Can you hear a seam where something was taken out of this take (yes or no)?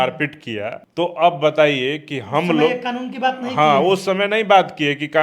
no